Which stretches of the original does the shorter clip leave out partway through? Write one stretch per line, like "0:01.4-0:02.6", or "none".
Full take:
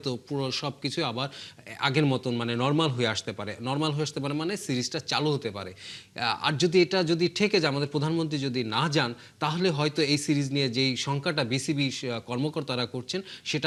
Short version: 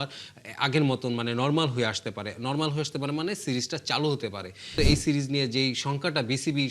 0:05.9-0:09.9